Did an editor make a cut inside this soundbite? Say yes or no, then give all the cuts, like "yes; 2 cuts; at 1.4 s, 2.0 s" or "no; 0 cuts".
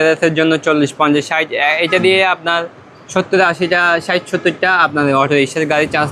no; 0 cuts